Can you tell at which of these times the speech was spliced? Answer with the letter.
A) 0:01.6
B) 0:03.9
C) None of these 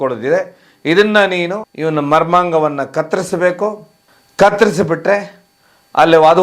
A